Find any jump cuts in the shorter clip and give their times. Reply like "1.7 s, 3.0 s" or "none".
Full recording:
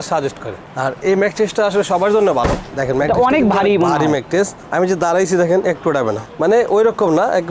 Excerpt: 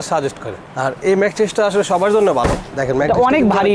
none